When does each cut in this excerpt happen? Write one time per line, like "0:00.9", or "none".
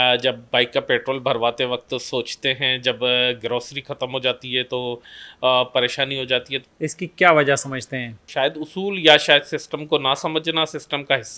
0:06.5
0:08.2

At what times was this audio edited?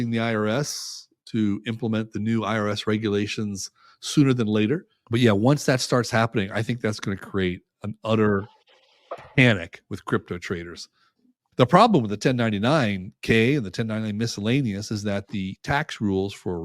0:04.9
0:11.4

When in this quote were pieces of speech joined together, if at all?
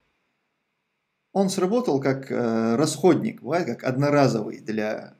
none

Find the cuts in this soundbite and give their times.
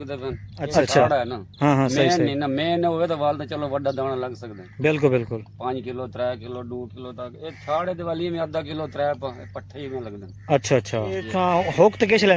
0:01.0
0:11.3

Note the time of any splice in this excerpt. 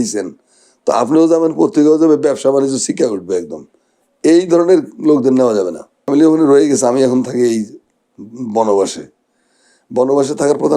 0:06.1

